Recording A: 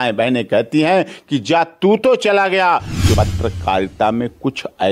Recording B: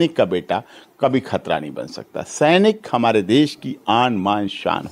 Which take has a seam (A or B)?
A